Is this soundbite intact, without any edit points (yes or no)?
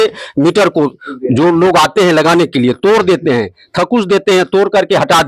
yes